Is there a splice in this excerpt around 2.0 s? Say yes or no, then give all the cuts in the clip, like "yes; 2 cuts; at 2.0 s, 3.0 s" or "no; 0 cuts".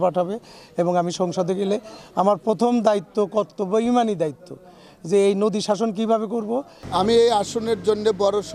no; 1 cut; at 6.8 s